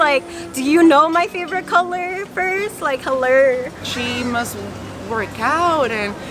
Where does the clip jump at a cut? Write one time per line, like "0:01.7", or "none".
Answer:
0:03.9